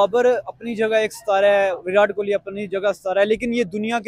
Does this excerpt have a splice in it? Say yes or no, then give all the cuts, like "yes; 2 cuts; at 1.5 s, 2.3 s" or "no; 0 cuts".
no; 0 cuts